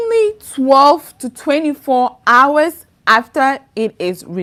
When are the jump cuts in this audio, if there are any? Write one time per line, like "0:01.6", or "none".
none